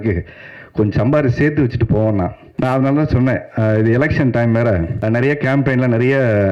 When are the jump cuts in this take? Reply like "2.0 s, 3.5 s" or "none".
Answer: 2.4 s, 4.9 s